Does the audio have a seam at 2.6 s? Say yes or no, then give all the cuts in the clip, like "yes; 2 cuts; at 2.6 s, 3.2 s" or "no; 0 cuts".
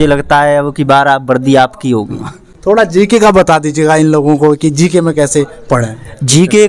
no; 0 cuts